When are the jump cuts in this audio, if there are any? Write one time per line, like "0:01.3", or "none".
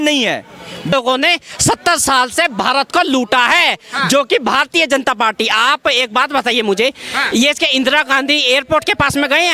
0:00.9